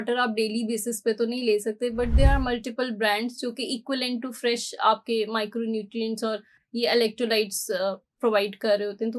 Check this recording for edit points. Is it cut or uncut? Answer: uncut